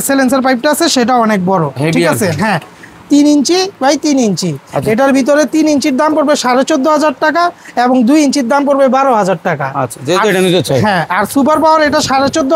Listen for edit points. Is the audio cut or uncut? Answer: uncut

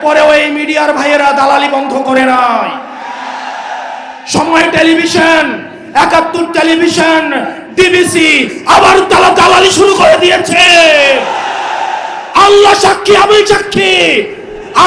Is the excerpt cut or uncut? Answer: uncut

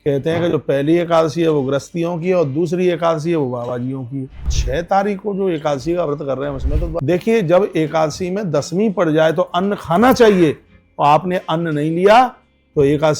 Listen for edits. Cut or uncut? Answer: cut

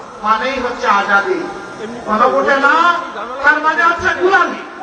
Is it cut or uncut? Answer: uncut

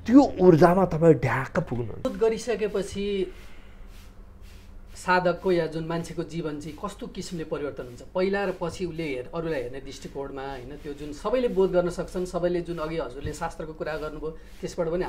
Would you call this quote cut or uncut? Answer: cut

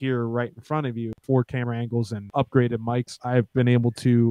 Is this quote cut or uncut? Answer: cut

